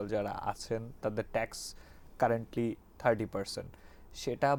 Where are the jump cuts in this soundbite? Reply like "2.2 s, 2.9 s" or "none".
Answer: none